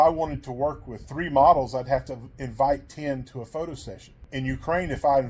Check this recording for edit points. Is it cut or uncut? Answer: cut